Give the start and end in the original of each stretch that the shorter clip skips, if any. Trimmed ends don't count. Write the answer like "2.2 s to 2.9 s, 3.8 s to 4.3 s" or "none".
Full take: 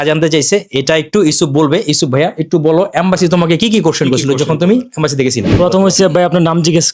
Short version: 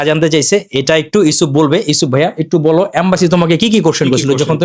none